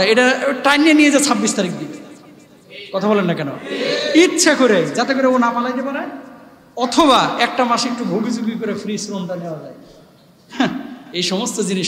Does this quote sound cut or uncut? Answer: uncut